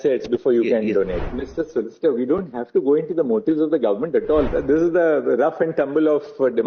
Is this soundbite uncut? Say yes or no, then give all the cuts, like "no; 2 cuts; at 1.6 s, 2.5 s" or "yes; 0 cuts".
no; 2 cuts; at 1.2 s, 4.5 s